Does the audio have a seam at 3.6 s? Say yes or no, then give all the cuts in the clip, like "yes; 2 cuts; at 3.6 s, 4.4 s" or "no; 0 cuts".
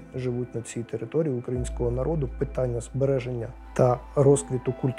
yes; 1 cut; at 3.6 s